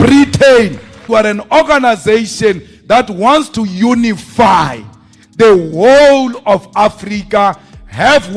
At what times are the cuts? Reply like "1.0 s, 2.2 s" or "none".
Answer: 1.0 s